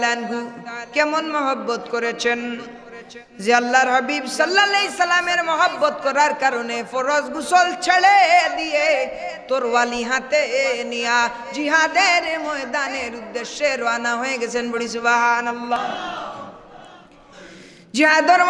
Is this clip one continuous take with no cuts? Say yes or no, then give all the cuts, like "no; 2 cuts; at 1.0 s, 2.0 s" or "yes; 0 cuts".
no; 1 cut; at 15.8 s